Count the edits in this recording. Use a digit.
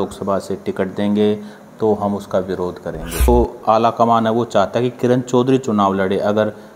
1